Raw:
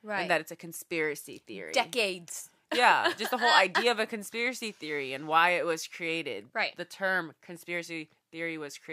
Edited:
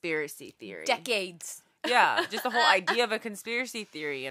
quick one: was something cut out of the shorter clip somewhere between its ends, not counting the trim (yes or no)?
no